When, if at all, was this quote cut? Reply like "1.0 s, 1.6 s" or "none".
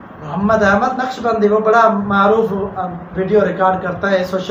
none